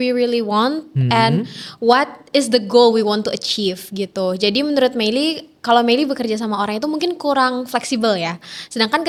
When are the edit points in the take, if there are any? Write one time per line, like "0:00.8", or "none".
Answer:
none